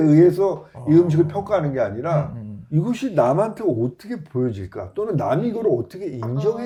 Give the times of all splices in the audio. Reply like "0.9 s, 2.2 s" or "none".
none